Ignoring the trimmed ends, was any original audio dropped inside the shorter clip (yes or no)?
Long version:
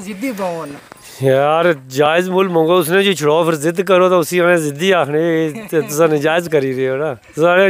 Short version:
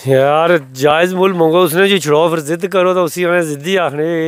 no